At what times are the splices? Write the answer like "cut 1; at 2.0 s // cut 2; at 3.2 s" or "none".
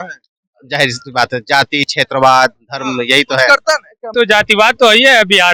cut 1; at 4.1 s

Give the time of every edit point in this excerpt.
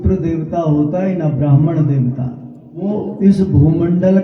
cut 1; at 2.9 s

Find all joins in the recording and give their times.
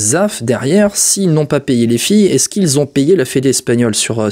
none

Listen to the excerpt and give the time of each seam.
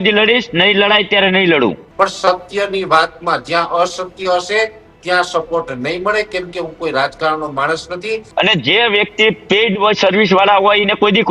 cut 1; at 1.8 s // cut 2; at 8.3 s

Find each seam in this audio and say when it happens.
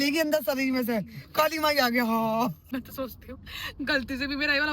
cut 1; at 2.6 s

